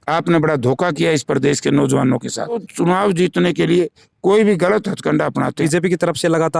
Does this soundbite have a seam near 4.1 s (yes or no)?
no